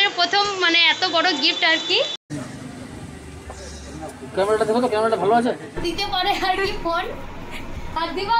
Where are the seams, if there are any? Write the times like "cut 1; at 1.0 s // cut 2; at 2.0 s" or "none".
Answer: cut 1; at 2.3 s // cut 2; at 5.8 s